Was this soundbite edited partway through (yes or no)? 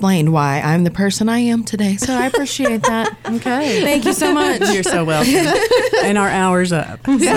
no